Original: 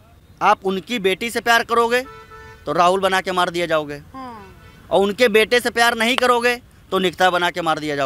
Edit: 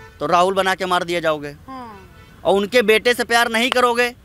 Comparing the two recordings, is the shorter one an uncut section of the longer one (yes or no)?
yes